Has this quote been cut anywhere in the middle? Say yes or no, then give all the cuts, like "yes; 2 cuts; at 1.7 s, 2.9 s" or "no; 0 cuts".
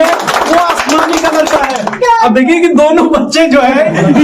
yes; 1 cut; at 1.9 s